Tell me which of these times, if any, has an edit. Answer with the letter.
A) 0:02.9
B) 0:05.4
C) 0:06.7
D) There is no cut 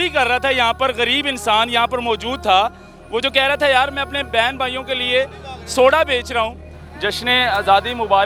C